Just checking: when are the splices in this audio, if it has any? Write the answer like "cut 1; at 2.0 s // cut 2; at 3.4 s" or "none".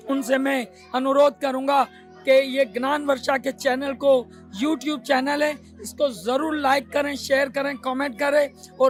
none